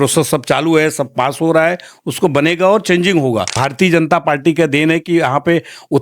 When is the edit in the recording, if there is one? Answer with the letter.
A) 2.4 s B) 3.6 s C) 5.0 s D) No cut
B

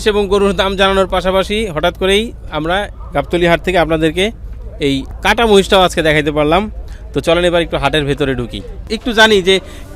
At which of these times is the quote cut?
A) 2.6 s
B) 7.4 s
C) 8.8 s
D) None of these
C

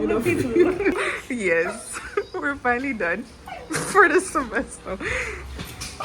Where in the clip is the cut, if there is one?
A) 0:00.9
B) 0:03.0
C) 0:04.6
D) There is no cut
A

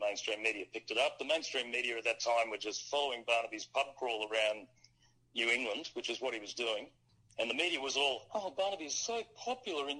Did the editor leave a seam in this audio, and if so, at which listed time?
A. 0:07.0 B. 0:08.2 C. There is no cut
A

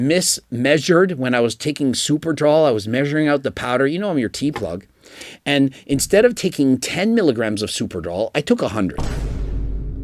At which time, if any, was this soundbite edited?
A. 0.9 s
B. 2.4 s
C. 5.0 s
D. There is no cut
D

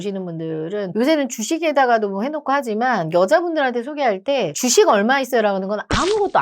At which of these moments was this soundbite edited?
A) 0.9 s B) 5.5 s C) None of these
A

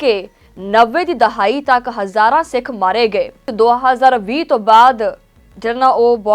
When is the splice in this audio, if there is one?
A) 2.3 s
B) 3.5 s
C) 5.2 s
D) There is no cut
B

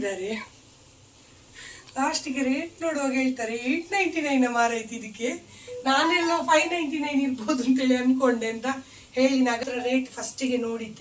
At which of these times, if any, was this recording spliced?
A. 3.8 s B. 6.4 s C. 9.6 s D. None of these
C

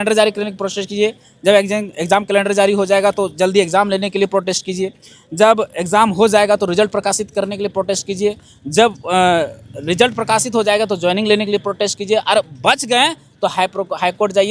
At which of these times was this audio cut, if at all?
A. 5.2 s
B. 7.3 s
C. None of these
C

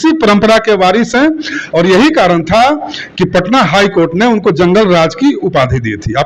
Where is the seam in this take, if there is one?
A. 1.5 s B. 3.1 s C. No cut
C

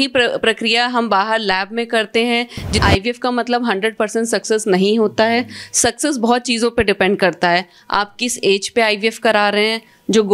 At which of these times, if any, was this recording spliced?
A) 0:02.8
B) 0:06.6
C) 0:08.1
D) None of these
A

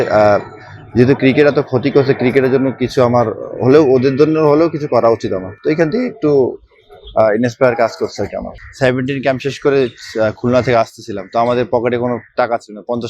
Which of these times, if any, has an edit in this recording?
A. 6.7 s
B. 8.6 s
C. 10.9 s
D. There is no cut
B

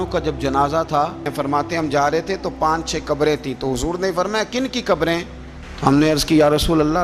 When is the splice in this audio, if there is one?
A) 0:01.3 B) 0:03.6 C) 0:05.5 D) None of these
A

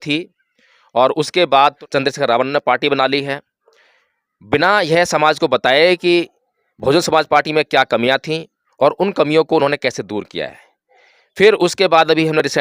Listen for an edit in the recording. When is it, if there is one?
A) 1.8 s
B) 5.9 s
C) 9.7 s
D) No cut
A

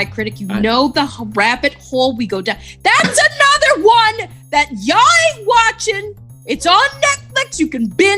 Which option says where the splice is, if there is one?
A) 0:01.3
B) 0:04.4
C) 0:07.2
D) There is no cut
D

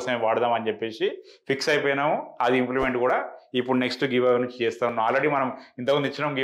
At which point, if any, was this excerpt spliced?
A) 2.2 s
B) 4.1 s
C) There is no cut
C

